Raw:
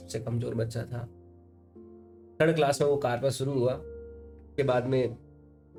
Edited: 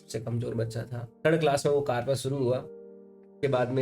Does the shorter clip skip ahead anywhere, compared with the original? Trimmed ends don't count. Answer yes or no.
yes